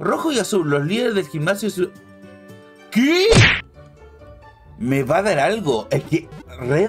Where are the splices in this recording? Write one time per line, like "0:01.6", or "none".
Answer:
0:03.4